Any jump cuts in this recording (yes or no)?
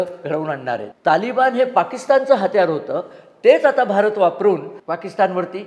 yes